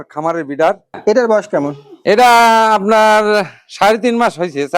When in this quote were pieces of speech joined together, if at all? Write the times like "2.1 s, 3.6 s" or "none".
1.0 s